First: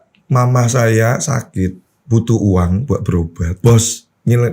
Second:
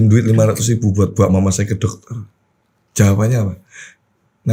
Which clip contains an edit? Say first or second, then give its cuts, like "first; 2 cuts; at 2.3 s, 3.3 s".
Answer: first; 2 cuts; at 1.9 s, 3.5 s